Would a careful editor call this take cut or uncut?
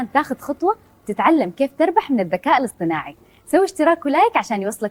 uncut